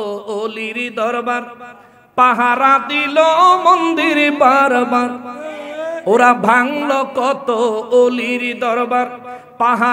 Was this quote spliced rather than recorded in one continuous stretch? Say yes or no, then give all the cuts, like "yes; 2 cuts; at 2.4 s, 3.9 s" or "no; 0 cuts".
no; 0 cuts